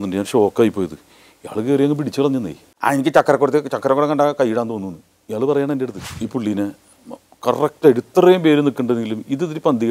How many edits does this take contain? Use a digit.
2